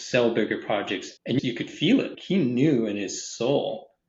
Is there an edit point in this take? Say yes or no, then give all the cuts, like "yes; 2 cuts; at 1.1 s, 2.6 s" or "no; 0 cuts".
yes; 2 cuts; at 1.4 s, 2.2 s